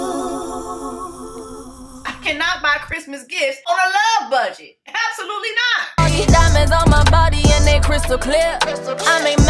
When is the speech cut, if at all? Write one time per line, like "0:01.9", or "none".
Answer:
0:01.9
0:03.7
0:05.9